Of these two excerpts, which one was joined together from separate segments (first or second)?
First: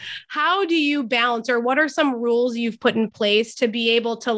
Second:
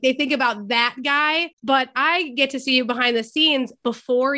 second